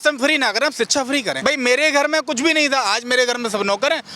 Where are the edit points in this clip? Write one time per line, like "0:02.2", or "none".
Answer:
0:01.4